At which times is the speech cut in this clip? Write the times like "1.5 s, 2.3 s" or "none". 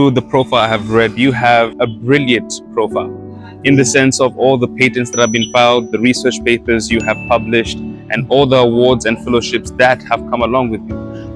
1.7 s

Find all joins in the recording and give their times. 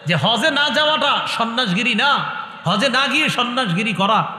none

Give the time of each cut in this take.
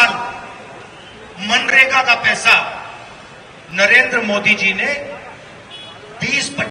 none

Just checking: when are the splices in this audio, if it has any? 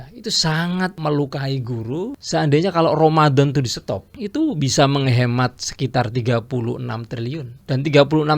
1.0 s, 2.2 s, 4.1 s, 7.6 s

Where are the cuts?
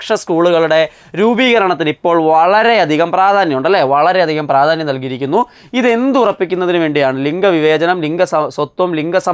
none

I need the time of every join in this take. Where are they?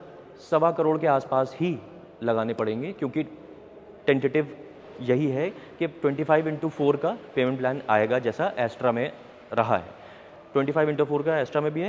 none

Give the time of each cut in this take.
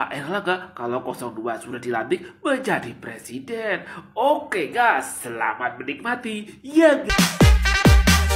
7.0 s

